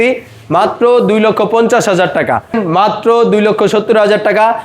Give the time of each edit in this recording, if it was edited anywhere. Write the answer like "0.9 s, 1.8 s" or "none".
2.6 s